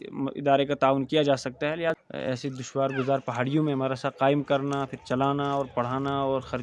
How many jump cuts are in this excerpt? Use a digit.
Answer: 1